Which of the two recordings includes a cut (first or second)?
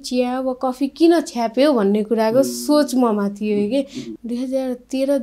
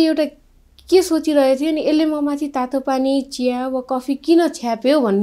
first